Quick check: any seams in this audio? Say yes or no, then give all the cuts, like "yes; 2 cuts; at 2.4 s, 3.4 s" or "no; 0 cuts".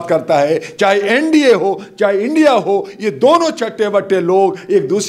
no; 0 cuts